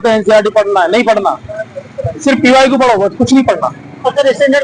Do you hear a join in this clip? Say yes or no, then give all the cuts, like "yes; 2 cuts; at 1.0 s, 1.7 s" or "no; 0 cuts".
no; 0 cuts